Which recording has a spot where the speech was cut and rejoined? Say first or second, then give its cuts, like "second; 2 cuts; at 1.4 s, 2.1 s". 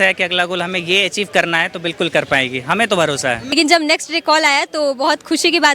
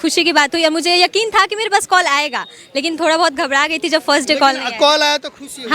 first; 1 cut; at 3.5 s